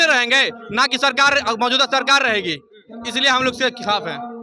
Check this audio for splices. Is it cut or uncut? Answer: uncut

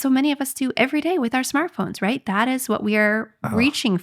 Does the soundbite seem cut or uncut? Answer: uncut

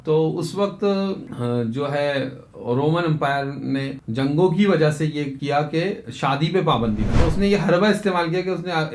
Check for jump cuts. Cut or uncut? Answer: cut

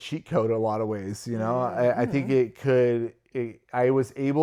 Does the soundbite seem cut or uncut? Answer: uncut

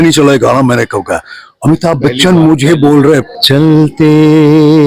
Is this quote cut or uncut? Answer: cut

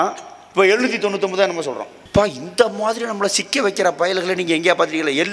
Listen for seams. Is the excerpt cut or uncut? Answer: cut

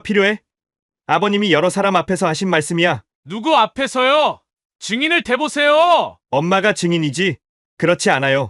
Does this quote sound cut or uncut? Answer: uncut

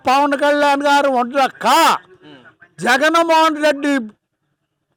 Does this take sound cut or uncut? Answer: uncut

